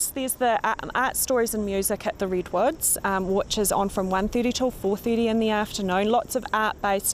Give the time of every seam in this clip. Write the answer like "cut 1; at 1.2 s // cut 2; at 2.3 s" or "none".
none

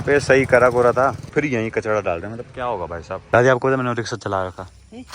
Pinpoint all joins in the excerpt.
cut 1; at 1.2 s // cut 2; at 3.1 s

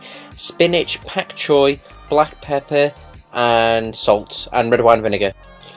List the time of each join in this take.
cut 1; at 1.6 s

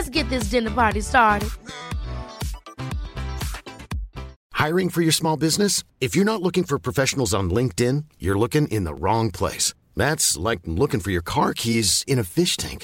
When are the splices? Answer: cut 1; at 4.4 s

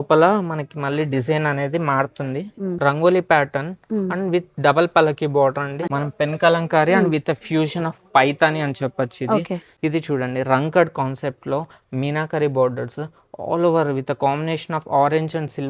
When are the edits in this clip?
cut 1; at 2.8 s // cut 2; at 5.9 s // cut 3; at 9.7 s

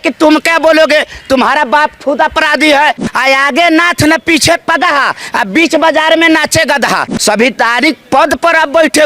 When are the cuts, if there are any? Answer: cut 1; at 3.1 s // cut 2; at 7.1 s

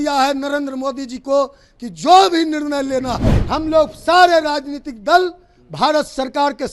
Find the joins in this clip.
cut 1; at 3.3 s

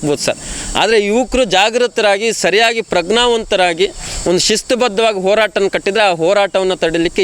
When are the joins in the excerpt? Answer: none

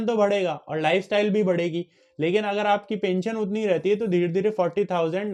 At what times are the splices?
none

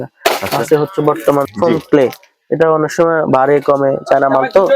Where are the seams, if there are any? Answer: cut 1; at 1.5 s

